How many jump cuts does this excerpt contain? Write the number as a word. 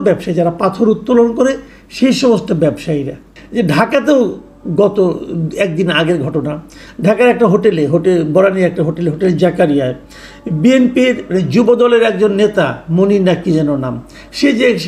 one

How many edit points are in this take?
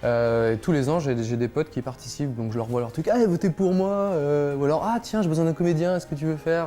one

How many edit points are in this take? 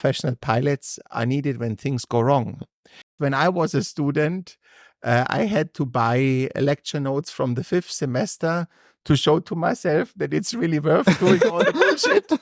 one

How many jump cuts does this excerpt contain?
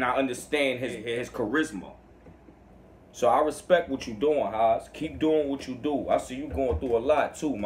one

